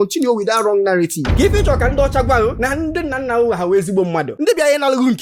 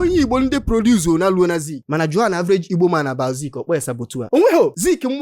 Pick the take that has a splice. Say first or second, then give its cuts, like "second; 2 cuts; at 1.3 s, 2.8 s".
second; 2 cuts; at 1.8 s, 4.2 s